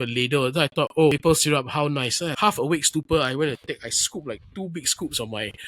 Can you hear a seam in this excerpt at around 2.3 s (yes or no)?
yes